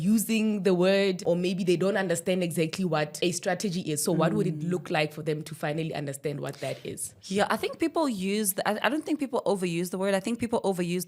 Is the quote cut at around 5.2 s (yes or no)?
no